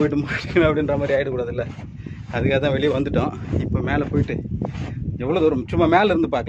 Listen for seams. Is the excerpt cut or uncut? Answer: uncut